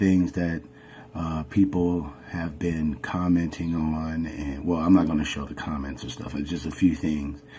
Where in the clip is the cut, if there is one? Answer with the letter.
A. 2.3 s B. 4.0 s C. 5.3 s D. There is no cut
D